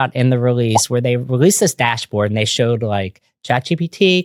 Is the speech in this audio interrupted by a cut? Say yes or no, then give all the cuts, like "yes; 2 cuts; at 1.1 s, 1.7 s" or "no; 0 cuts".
no; 0 cuts